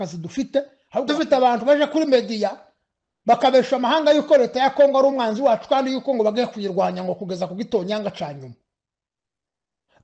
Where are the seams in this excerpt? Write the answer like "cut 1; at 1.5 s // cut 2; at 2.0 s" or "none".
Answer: cut 1; at 1.0 s